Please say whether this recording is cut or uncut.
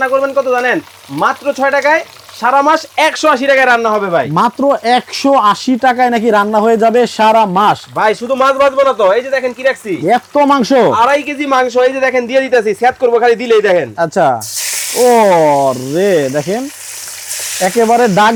uncut